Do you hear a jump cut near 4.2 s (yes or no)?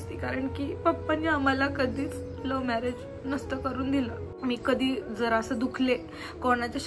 yes